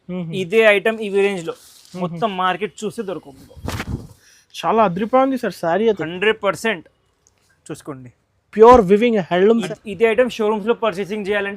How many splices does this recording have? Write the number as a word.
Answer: one